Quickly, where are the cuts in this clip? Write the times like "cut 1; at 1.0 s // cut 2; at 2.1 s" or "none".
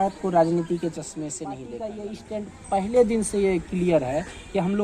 cut 1; at 1.6 s